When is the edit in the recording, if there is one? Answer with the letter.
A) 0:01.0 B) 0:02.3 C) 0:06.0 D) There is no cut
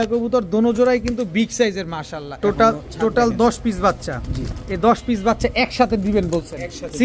B